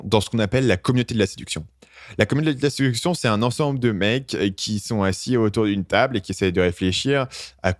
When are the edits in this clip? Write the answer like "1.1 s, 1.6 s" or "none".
none